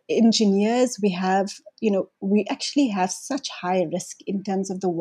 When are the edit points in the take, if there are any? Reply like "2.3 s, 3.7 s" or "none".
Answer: none